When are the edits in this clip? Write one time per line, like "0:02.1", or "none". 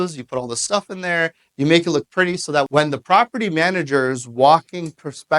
0:02.7

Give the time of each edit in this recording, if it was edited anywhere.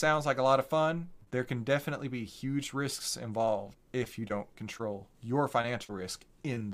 0:01.2
0:03.8
0:05.1

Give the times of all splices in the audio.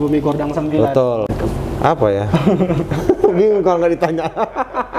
0:01.3

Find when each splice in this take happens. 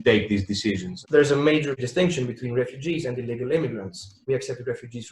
0:00.9
0:04.2

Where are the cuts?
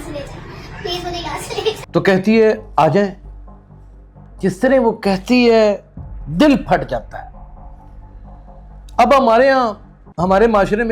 0:01.8

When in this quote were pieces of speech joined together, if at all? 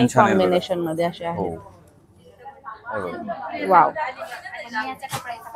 none

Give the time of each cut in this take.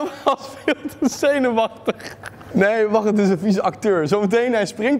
none

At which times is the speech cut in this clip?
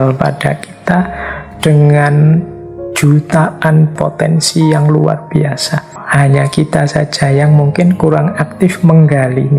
0:03.9
0:06.0

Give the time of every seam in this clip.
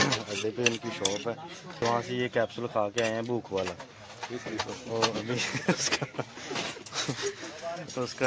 0:01.8

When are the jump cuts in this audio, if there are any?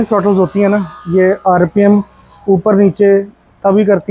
none

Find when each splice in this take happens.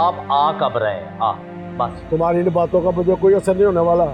0:02.0

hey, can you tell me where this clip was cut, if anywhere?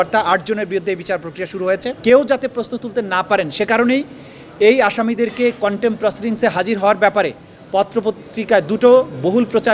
0:01.9

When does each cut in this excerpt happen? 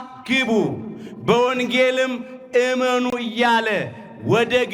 none

